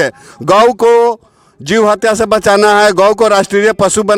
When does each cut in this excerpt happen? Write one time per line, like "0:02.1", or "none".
none